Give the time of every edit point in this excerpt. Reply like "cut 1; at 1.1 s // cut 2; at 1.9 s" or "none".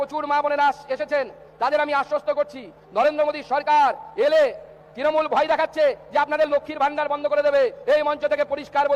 none

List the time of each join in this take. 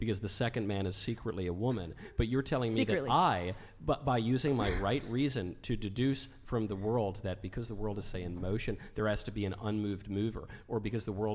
none

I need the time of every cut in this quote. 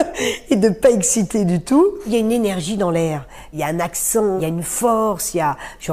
cut 1; at 2.1 s // cut 2; at 3.5 s // cut 3; at 4.4 s

